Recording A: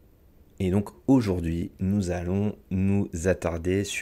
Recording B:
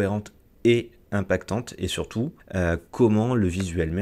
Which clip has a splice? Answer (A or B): B